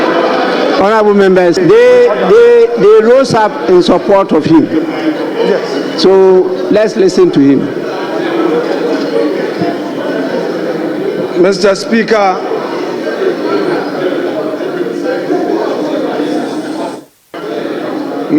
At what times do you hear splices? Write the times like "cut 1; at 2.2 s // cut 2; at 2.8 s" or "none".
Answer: cut 1; at 1.6 s